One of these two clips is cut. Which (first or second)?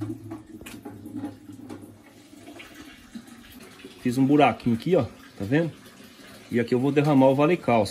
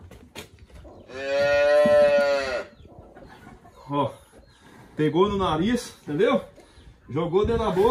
first